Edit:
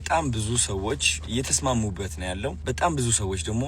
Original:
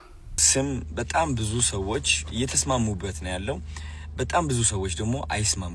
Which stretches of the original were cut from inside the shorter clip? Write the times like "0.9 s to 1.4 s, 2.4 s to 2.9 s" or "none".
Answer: 3.6 s to 4.1 s